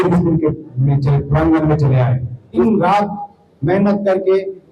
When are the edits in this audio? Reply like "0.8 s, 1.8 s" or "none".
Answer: 2.6 s